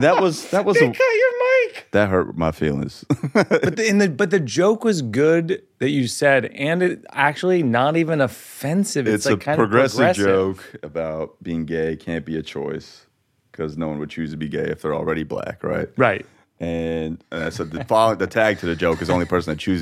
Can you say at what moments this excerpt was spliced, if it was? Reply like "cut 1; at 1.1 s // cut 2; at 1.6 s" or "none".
cut 1; at 3.7 s // cut 2; at 10.7 s // cut 3; at 17.2 s